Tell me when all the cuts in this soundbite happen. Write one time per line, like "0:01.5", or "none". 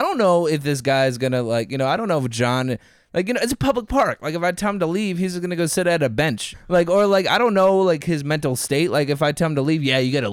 0:06.5